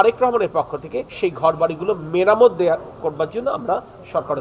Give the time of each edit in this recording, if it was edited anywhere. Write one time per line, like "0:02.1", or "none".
0:01.0